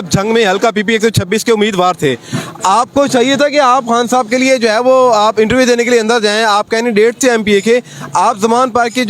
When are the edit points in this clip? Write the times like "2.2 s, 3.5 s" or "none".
none